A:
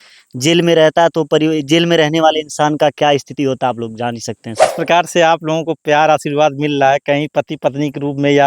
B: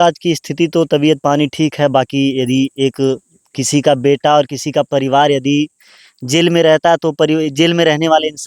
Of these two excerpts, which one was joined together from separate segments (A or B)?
A